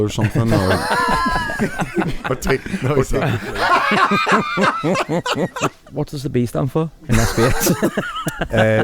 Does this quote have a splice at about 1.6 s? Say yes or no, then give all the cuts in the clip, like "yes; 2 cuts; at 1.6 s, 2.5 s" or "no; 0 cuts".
no; 1 cut; at 5.8 s